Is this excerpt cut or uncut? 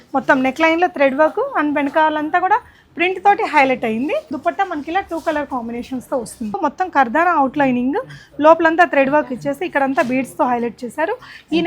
cut